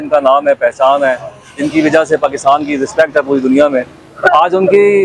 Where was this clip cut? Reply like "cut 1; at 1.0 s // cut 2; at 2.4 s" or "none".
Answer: none